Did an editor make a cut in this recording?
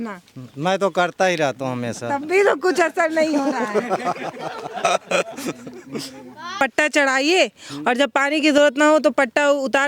yes; 1 cut; at 6.6 s

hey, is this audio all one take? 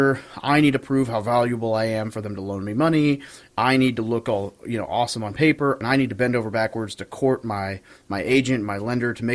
no; 1 cut; at 5.8 s

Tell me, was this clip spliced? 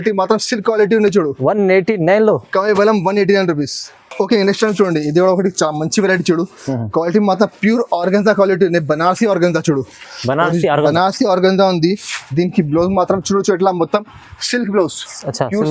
no; 0 cuts

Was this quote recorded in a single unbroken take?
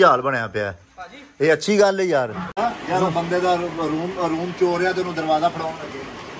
no; 1 cut; at 2.4 s

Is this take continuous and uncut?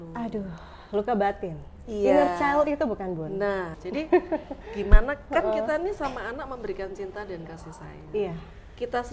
no; 1 cut; at 3.8 s

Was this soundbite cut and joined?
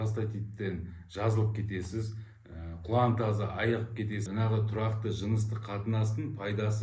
yes; 1 cut; at 4.2 s

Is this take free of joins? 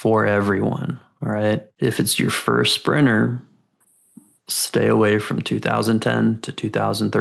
no; 1 cut; at 1.7 s

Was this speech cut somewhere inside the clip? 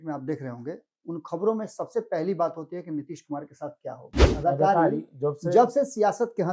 yes; 1 cut; at 4.2 s

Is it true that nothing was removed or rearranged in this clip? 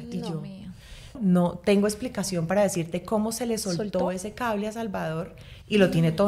no; 1 cut; at 1.2 s

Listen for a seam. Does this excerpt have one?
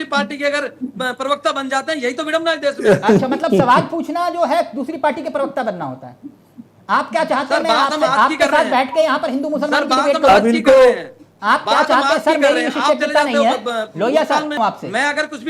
yes; 1 cut; at 14.6 s

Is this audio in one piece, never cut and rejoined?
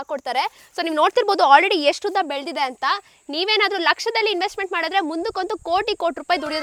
yes; 0 cuts

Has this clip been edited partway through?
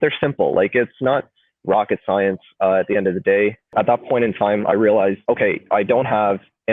yes; 2 cuts; at 3.7 s, 5.2 s

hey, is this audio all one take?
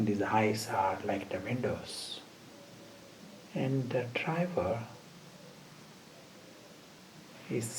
no; 2 cuts; at 3.2 s, 7.0 s

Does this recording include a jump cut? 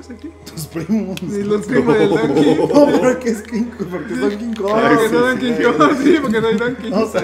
no; 0 cuts

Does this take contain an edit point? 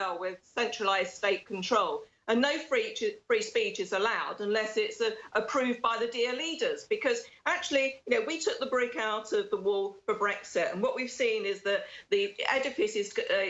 no; 0 cuts

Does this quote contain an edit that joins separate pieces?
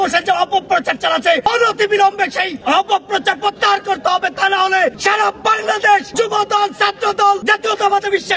yes; 5 cuts; at 1.5 s, 2.5 s, 5.0 s, 6.1 s, 7.4 s

